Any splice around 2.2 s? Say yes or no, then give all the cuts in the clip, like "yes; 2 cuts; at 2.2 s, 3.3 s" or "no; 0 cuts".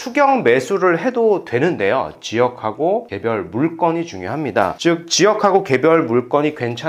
yes; 1 cut; at 2.2 s